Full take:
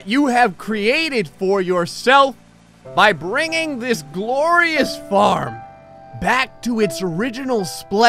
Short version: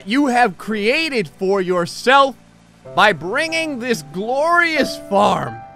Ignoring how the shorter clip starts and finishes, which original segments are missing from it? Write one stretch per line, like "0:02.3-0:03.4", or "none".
none